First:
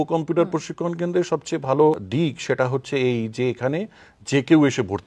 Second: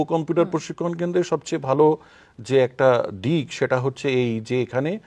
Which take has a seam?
first; 1 cut; at 2.1 s

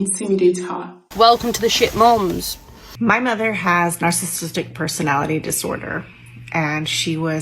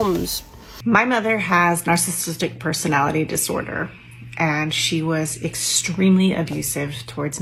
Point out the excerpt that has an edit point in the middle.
first; 1 cut; at 1.1 s

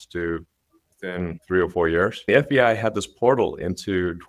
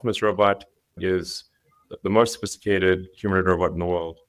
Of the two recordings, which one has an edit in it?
first; 2 cuts; at 1.4 s, 2.2 s

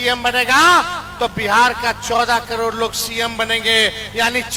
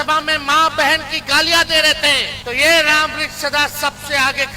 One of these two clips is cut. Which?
second; 1 cut; at 2.3 s

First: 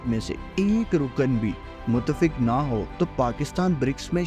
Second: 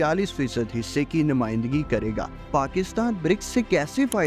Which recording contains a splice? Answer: second; 1 cut; at 2.5 s

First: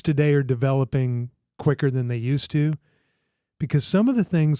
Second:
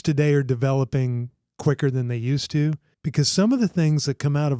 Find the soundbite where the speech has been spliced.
second; 1 cut; at 2.9 s

